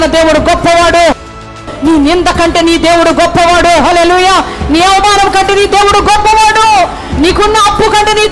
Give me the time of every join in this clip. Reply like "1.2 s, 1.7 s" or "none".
1.5 s

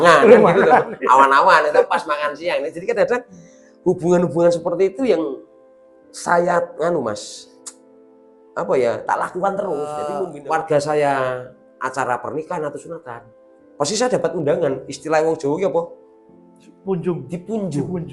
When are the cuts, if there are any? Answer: 10.2 s

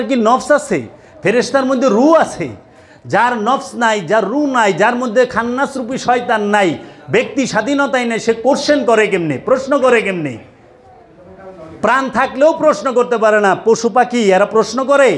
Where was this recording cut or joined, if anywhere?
none

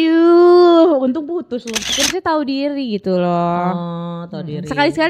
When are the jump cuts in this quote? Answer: 1.9 s

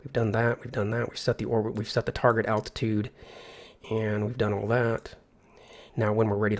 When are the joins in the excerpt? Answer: 2.2 s

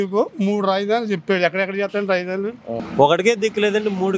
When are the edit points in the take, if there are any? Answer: 2.8 s

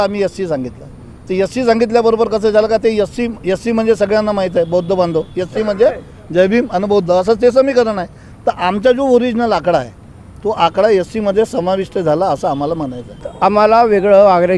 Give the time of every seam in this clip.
13.2 s

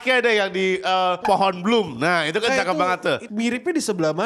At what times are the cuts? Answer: 1.2 s, 3.2 s

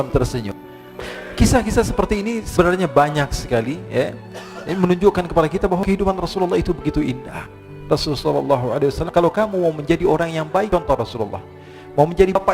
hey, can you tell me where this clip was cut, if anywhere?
0.9 s

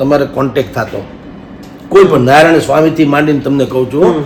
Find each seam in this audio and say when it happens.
none

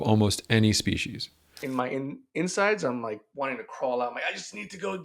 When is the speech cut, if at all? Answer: 1.6 s, 3.2 s

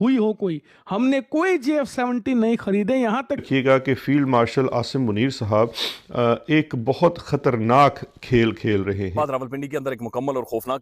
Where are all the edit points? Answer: 3.4 s

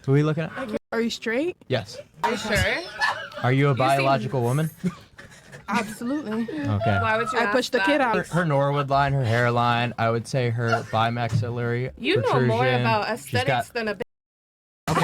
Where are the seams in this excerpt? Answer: 0.8 s, 2.2 s, 8.1 s

